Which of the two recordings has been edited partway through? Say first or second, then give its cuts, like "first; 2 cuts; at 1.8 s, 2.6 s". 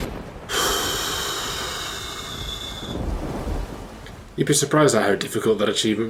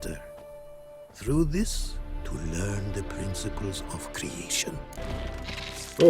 second; 1 cut; at 5.0 s